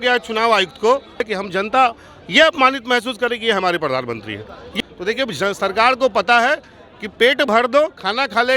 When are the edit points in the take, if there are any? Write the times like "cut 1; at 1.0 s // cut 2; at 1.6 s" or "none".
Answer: cut 1; at 1.3 s // cut 2; at 4.6 s